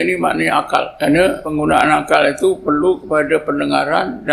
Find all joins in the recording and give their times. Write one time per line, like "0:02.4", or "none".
0:01.3